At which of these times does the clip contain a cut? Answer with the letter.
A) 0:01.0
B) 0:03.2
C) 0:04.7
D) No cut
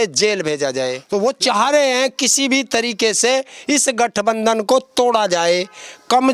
A